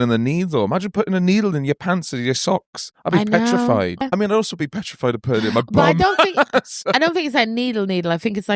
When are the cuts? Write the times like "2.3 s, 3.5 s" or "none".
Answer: 4.0 s